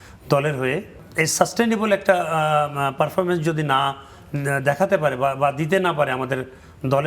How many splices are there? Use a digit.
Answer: 1